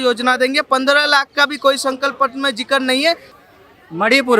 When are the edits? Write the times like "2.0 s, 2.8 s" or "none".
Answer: 3.3 s